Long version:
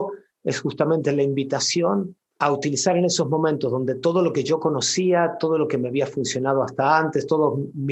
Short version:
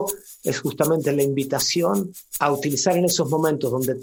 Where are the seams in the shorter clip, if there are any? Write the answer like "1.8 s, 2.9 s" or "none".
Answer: none

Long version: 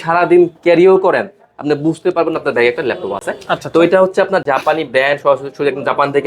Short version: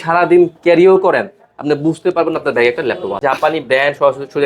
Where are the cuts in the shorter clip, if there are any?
3.2 s

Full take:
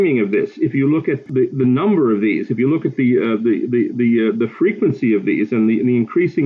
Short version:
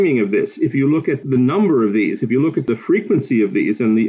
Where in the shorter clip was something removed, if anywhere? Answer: 1.2 s, 2.7 s

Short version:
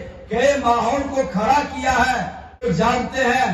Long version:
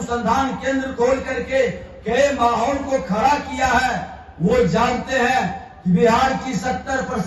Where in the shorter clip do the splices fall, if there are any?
2.6 s

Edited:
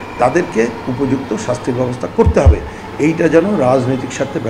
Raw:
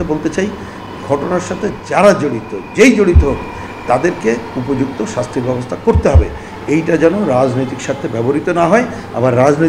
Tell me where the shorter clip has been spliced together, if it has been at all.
none

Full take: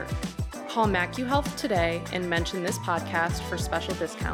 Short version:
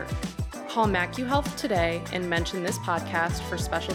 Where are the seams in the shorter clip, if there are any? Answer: none

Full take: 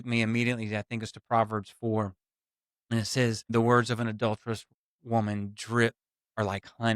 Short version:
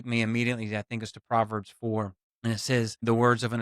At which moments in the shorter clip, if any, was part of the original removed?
2.2 s

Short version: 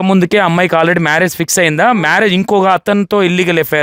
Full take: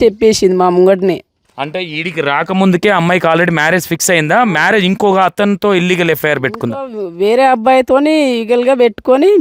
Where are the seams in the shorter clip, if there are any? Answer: none

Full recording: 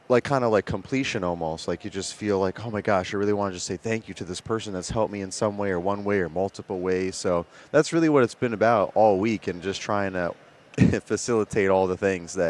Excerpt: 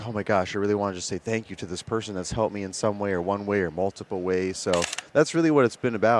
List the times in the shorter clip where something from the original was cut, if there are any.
none

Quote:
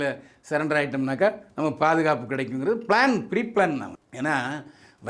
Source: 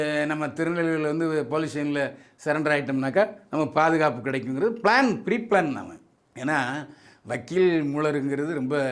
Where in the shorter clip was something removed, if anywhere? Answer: 4.0 s

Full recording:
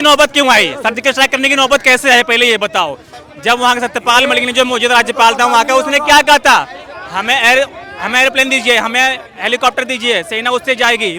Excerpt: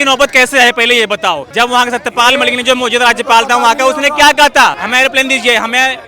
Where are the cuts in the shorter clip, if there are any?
1.5 s, 4.8 s

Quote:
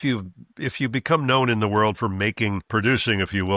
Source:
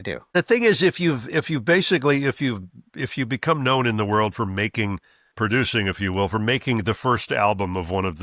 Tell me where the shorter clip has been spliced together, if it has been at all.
2.6 s

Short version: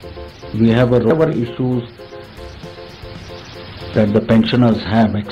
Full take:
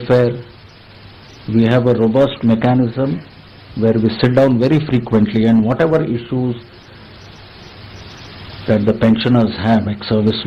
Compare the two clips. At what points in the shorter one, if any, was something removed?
1.1 s

